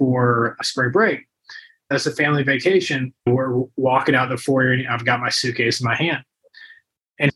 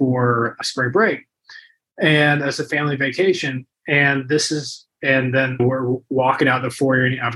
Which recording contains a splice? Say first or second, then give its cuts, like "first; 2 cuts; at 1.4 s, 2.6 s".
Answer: first; 2 cuts; at 1.9 s, 3.2 s